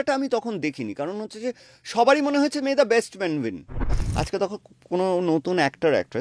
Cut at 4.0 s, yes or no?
yes